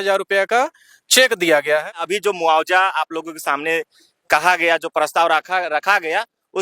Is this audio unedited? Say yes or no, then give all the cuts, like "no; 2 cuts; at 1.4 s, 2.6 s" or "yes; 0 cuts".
no; 1 cut; at 1.9 s